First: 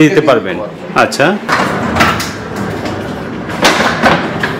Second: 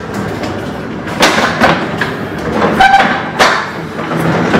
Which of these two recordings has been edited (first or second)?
first